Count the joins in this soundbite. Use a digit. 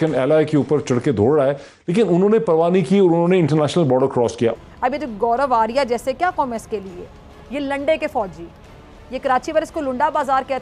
1